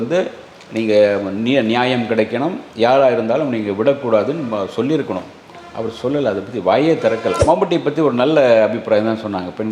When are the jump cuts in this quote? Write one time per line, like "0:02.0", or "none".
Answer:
0:07.4